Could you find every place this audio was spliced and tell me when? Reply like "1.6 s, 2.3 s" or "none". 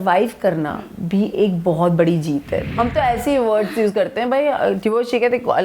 2.7 s